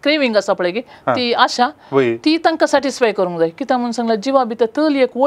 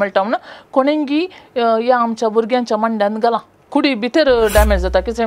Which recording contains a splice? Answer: second; 1 cut; at 3.6 s

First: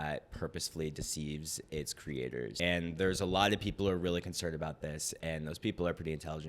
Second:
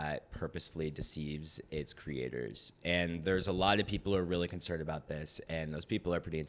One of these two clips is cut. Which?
first; 1 cut; at 2.5 s

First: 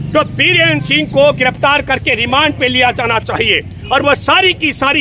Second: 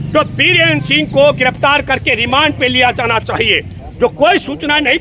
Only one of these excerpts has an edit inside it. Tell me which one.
second; 1 cut; at 3.7 s

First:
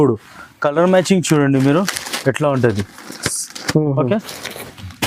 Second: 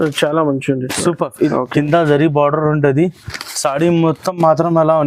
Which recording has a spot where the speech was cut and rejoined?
second; 1 cut; at 1.5 s

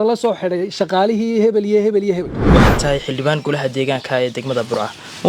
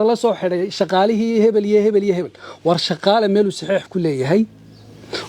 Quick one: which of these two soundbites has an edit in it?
first; 1 cut; at 2.4 s

